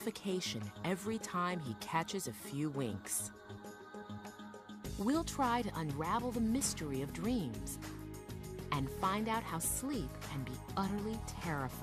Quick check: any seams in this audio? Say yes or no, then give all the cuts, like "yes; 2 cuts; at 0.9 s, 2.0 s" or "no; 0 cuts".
no; 0 cuts